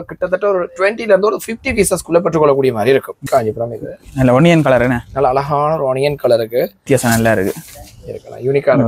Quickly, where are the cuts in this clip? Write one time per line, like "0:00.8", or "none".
0:03.2
0:06.8